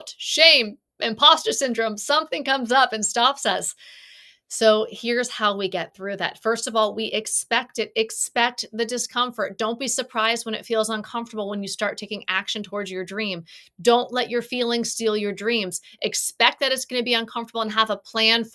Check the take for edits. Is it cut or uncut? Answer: uncut